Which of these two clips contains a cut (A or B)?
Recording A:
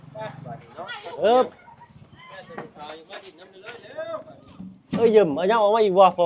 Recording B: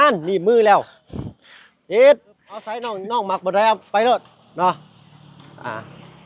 B